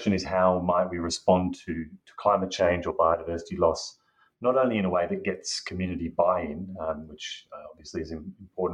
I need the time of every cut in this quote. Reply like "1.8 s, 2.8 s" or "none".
none